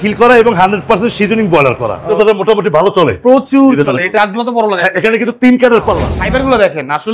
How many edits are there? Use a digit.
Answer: 3